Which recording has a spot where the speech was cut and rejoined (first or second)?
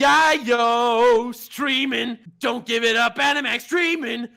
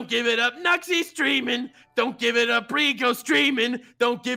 first